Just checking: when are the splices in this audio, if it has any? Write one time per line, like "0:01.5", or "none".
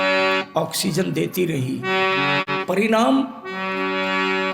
0:02.4